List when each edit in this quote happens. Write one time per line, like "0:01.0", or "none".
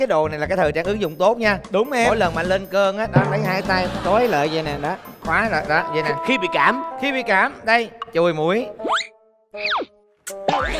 none